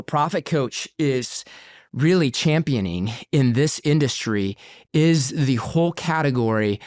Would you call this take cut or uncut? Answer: uncut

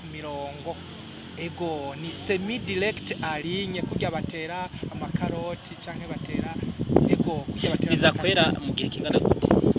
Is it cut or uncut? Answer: uncut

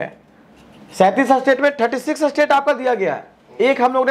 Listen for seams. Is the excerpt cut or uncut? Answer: uncut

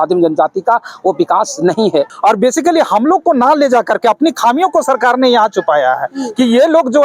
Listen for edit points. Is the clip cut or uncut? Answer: cut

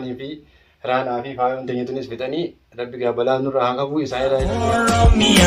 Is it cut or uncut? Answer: cut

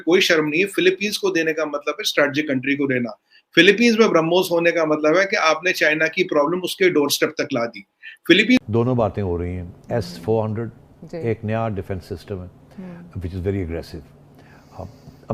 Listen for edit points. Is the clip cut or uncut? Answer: cut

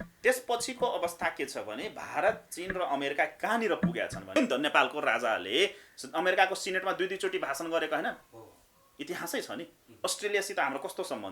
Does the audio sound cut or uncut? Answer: cut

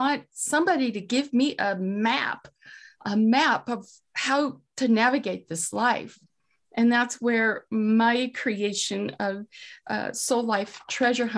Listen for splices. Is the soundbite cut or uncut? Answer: uncut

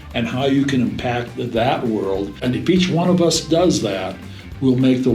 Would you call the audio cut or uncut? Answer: cut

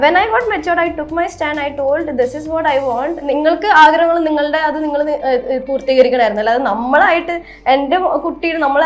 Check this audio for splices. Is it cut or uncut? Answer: cut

